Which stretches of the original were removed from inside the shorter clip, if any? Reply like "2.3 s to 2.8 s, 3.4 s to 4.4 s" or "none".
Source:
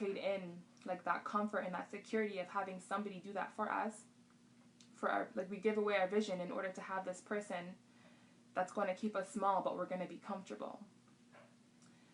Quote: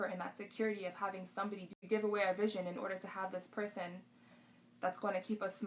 3.3 s to 5.5 s